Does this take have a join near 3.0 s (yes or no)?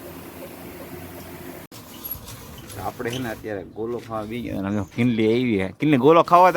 no